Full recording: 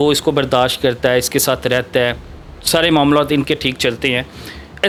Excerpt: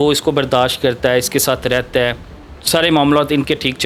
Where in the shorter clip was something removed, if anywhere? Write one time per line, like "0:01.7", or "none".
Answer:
none